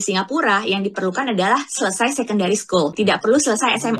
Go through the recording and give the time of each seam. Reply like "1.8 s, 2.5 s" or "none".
2.9 s